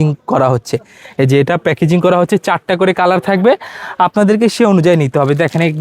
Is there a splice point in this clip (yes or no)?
no